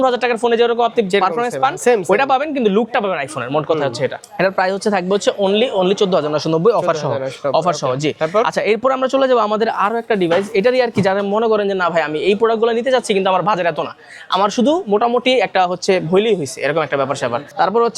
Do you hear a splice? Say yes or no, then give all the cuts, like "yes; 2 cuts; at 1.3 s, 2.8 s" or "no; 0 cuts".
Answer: no; 0 cuts